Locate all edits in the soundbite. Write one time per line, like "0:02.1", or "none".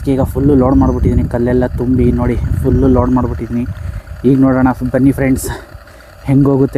none

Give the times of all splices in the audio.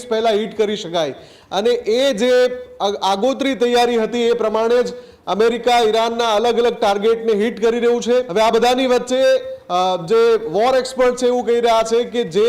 0:08.3

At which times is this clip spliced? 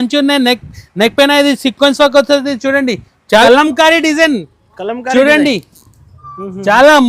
0:03.4

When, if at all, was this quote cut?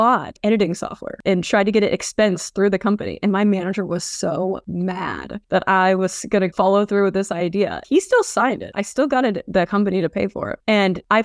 0:01.1
0:07.8

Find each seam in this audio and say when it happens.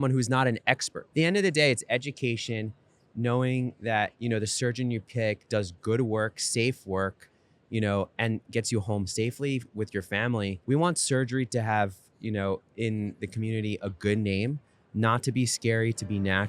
0:01.0
0:10.6

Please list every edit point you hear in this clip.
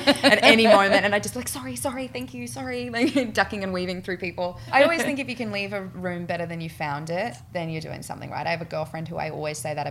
0:04.7
0:07.4

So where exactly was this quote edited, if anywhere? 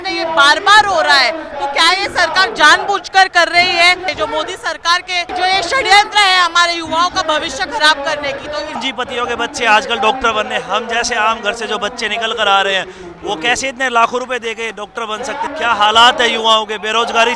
0:04.1
0:05.3
0:08.8
0:15.5

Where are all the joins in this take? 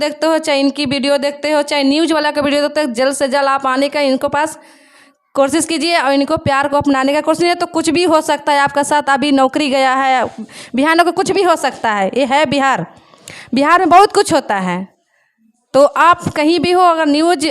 none

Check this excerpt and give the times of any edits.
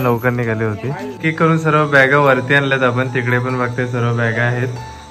0:01.2

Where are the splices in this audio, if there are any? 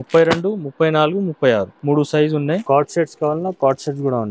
0:01.7
0:02.6

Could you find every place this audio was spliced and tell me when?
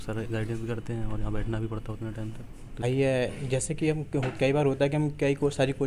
0:02.8

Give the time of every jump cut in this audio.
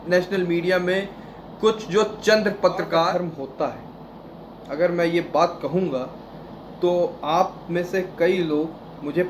0:03.2

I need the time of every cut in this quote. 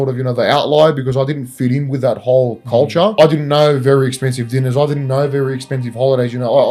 0:03.2

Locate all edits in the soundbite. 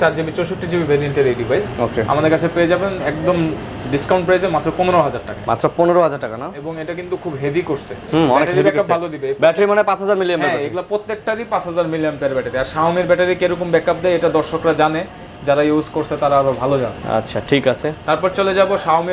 none

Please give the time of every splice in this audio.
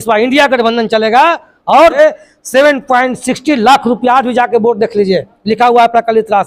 0:02.0

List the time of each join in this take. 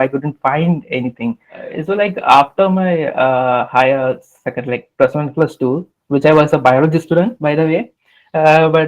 0:01.7

